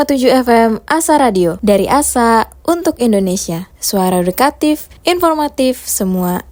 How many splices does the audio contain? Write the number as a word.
zero